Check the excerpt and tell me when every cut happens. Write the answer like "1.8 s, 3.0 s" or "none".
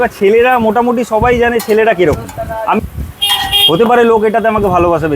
2.8 s

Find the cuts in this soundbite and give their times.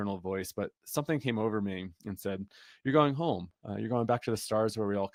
none

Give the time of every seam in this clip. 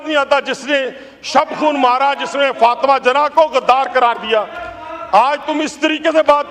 none

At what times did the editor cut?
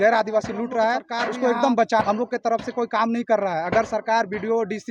2.0 s

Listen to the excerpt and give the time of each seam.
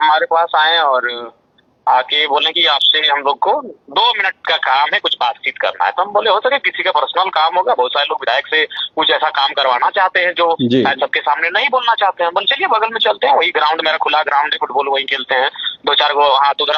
none

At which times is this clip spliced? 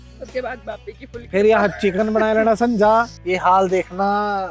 3.2 s

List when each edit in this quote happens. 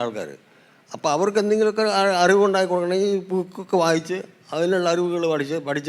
none

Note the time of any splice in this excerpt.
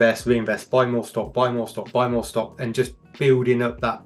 none

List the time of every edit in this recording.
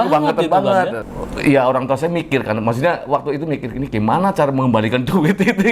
1.0 s

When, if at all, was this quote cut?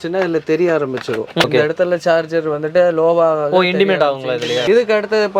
1.4 s, 4.6 s

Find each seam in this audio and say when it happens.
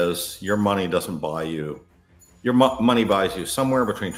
none

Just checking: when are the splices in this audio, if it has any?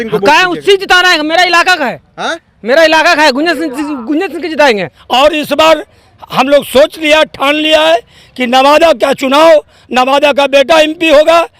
4.9 s

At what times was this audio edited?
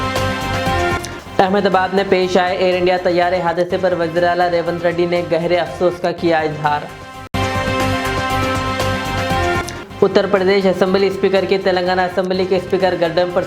none

